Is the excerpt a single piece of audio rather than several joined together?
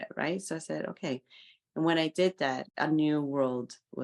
no; 1 cut; at 2.7 s

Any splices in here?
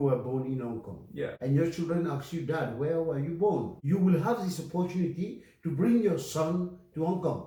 no; 0 cuts

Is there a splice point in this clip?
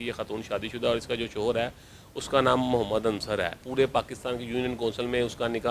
yes; 1 cut; at 3.6 s

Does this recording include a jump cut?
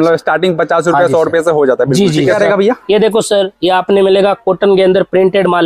yes; 1 cut; at 2.3 s

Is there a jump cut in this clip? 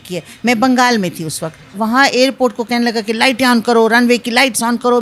yes; 1 cut; at 1.8 s

